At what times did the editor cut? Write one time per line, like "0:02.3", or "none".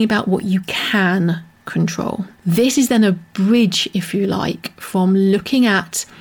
0:02.3